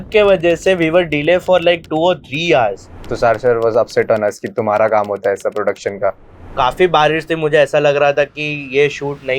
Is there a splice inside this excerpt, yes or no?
yes